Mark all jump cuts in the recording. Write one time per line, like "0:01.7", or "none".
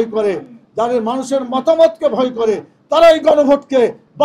none